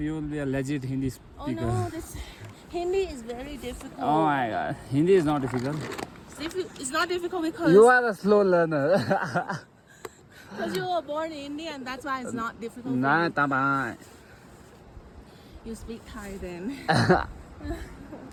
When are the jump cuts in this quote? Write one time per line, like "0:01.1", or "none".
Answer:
none